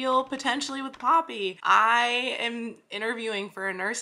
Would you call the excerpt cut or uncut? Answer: cut